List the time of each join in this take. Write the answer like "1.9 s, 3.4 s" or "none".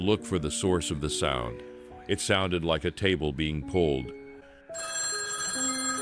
4.2 s